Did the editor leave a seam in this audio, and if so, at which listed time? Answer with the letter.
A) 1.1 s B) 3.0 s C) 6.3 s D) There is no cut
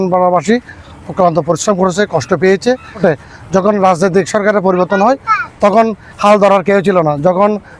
B